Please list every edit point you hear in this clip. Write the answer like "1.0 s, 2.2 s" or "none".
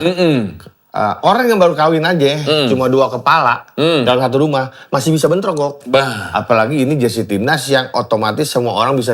none